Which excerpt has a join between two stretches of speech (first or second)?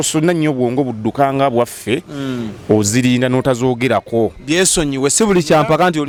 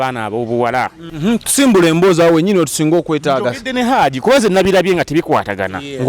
second